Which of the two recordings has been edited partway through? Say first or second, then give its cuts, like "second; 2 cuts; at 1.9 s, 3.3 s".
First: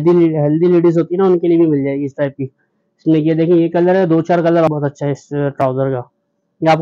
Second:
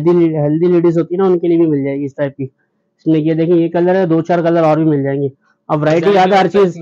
first; 1 cut; at 4.7 s